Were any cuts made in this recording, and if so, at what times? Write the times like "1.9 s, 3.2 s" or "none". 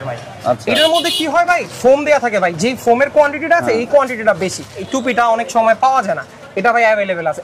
4.9 s